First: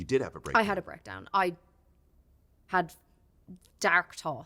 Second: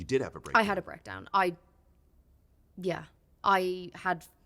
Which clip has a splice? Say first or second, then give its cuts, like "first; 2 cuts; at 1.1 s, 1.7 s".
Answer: first; 1 cut; at 2.6 s